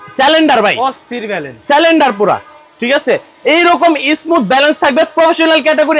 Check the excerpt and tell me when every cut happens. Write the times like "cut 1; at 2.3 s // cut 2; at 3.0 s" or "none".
none